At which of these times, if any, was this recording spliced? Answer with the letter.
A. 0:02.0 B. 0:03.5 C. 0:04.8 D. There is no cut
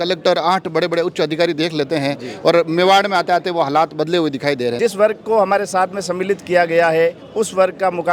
C